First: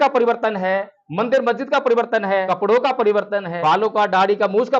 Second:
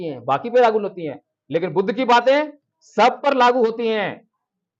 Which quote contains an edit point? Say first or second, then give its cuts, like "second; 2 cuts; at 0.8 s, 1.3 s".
first; 2 cuts; at 2.4 s, 3.5 s